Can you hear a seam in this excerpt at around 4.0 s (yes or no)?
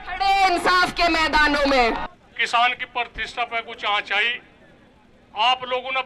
no